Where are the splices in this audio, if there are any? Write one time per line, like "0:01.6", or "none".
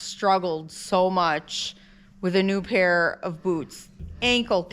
none